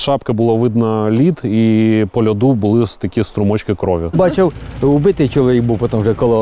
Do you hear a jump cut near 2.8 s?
no; 1 cut; at 4.1 s

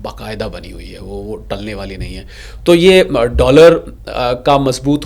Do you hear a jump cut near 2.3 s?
no; 0 cuts

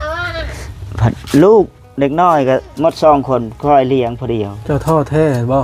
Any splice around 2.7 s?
yes; 2 cuts; at 2.7 s, 4.5 s

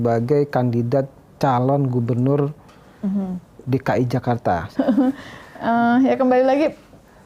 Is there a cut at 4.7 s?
yes; 1 cut; at 4.7 s

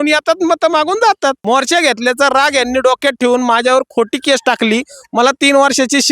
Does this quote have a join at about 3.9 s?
no; 1 cut; at 1.4 s

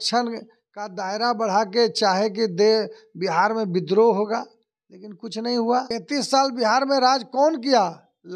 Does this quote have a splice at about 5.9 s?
yes; 1 cut; at 5.9 s

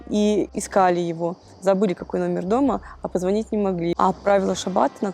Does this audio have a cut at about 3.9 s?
yes; 1 cut; at 3.9 s

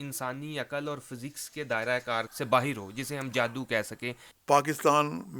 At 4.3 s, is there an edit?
yes; 2 cuts; at 2.3 s, 4.3 s

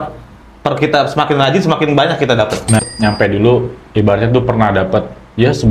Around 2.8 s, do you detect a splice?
yes; 1 cut; at 2.8 s

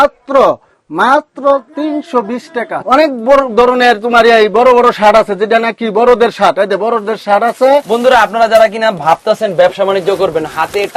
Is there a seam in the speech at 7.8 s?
yes; 2 cuts; at 2.8 s, 7.8 s

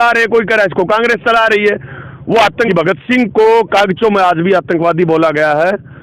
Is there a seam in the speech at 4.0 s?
no; 1 cut; at 2.7 s

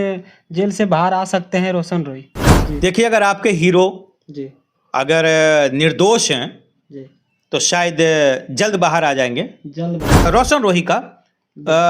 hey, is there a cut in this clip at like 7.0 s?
no; 2 cuts; at 2.4 s, 10.3 s

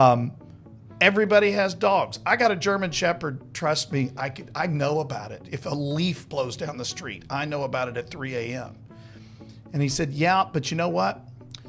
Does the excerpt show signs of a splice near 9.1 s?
no; 0 cuts

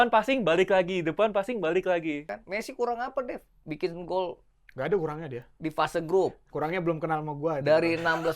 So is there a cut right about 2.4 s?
yes; 1 cut; at 2.4 s

